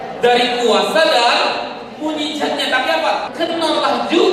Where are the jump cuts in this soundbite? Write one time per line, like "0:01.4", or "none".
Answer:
0:03.3